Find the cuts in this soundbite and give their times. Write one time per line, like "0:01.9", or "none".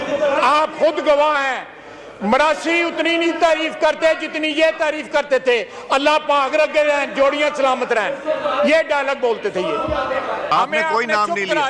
0:10.5